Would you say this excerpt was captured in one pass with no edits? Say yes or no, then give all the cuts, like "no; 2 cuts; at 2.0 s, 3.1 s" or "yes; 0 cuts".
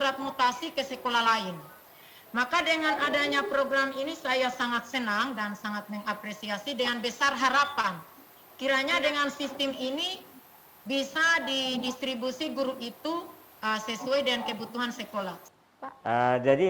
no; 1 cut; at 15.5 s